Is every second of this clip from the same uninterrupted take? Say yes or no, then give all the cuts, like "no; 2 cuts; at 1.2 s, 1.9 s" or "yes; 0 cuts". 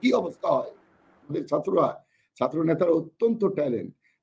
no; 1 cut; at 1.4 s